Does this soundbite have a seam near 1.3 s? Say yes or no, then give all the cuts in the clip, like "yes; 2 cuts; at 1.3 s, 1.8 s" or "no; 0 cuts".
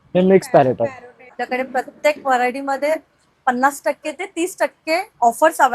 yes; 1 cut; at 1.3 s